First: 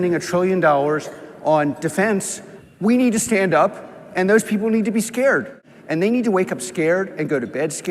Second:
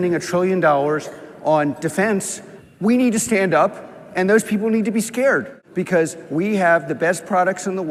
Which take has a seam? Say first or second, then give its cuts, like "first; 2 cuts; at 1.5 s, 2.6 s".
first; 1 cut; at 5.6 s